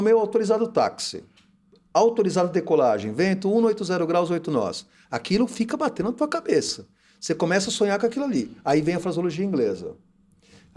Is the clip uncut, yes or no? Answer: yes